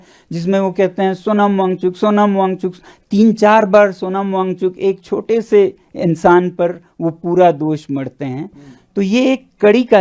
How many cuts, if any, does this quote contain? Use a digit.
0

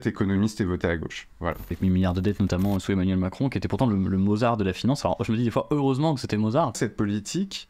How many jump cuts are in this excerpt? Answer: 2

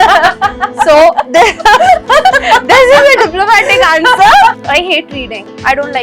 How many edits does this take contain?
1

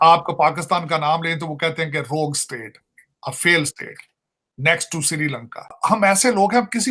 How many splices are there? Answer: 1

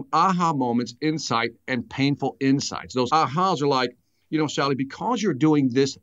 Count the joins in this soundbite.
1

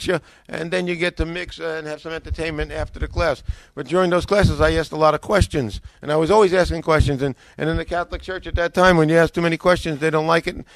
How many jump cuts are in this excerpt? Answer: 0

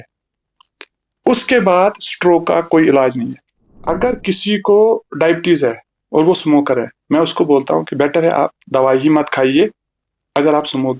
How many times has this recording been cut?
1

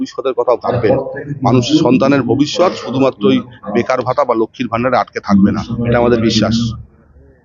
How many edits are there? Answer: 0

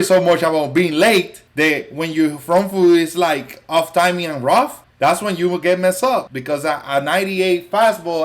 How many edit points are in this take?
3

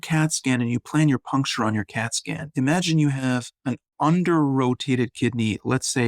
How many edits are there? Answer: 1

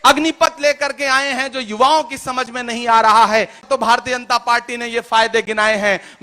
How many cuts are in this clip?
1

